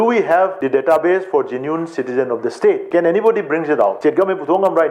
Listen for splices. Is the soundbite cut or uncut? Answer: uncut